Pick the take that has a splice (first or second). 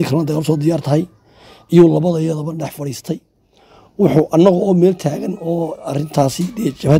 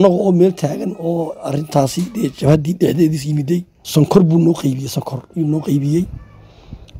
second